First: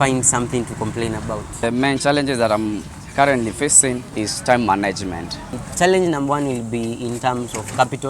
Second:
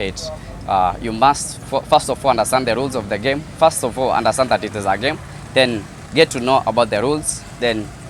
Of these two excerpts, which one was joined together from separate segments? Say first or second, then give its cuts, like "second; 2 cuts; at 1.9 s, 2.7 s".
first; 3 cuts; at 1.6 s, 4.3 s, 5.6 s